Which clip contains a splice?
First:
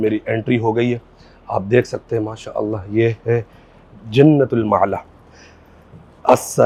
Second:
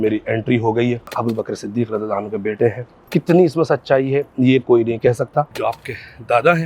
second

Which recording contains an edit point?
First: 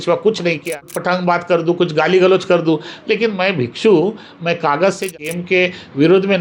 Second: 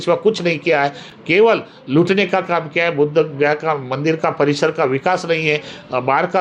first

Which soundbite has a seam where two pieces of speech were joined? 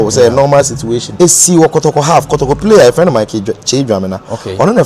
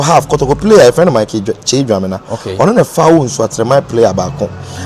first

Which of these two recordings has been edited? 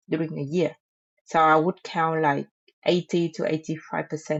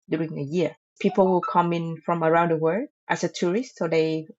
second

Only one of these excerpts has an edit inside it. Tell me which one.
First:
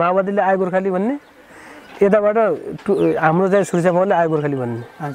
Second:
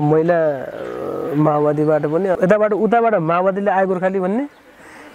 second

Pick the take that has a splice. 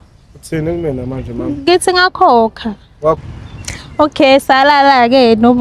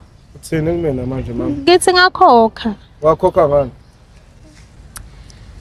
first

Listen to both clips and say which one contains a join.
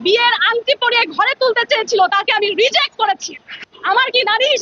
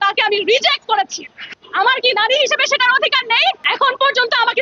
second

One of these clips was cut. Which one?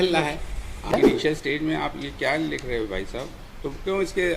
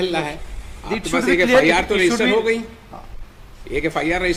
first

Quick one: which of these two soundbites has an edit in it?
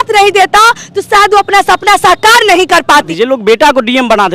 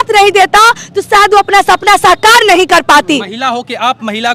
first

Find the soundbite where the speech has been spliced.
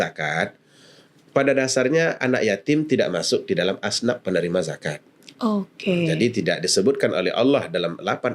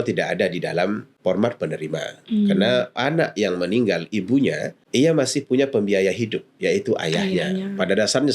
second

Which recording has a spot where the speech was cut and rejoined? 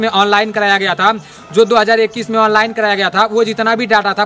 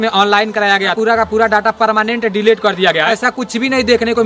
second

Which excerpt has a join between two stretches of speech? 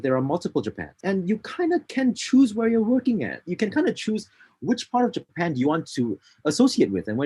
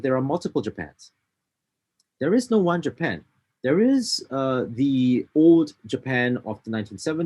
first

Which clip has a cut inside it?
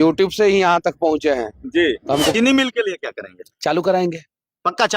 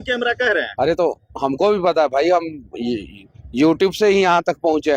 first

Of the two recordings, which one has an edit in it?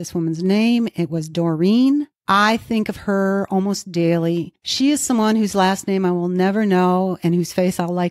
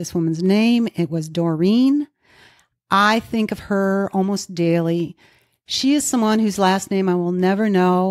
first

